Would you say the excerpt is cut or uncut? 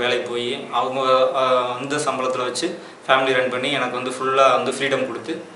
uncut